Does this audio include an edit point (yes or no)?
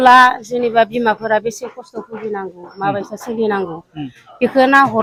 no